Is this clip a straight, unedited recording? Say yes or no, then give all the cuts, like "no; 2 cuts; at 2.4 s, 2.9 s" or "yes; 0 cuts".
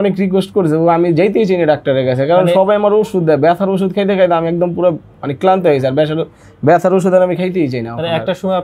yes; 0 cuts